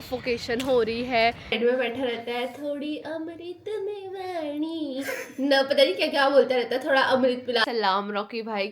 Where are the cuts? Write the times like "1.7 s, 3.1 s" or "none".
1.6 s, 7.6 s